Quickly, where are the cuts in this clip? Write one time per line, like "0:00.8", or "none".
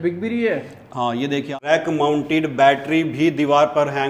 0:01.5